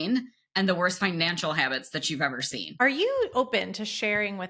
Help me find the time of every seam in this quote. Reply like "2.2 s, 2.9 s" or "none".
2.8 s